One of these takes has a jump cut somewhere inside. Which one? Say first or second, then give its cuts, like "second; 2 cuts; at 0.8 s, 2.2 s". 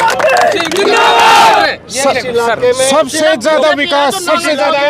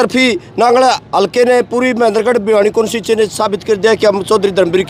first; 1 cut; at 1.7 s